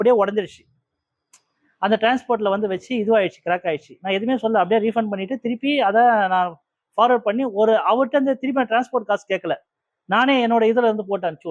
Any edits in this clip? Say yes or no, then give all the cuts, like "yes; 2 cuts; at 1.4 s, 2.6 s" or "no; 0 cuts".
no; 0 cuts